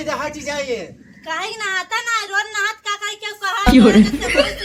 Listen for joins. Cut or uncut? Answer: uncut